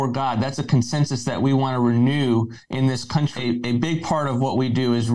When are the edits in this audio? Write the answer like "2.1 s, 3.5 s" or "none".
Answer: 3.3 s